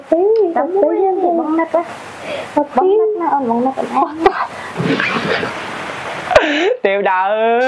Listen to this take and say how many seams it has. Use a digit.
1